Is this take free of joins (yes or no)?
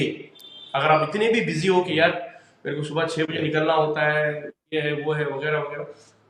yes